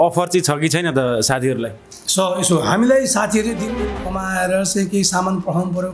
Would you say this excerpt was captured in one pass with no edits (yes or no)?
no